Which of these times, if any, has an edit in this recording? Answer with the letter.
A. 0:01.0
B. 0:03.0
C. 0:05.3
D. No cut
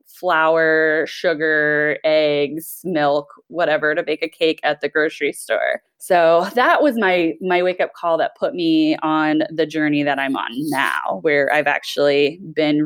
D